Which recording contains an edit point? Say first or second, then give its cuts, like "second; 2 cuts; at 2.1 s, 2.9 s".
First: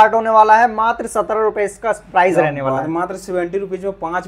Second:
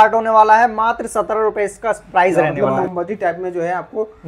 second; 1 cut; at 2.6 s